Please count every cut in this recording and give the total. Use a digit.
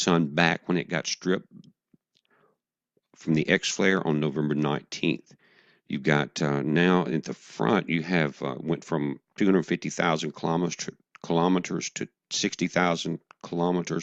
1